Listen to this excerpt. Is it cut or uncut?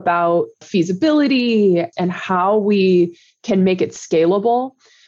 uncut